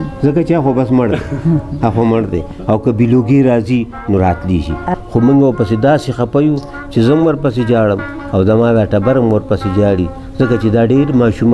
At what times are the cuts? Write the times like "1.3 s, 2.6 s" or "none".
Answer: 4.9 s